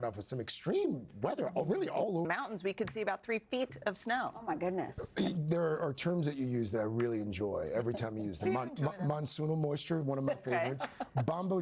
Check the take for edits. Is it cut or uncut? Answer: cut